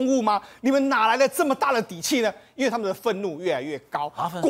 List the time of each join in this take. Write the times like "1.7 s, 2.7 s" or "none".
none